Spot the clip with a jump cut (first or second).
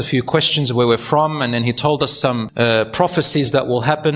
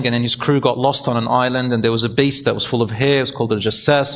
first